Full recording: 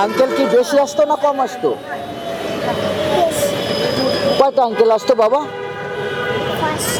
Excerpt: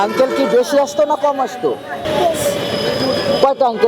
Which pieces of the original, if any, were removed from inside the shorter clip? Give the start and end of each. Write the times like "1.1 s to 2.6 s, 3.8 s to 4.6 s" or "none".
2.0 s to 3.0 s